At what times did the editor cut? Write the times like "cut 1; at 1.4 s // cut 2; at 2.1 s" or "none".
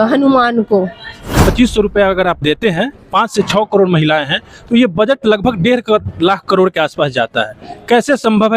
cut 1; at 1.5 s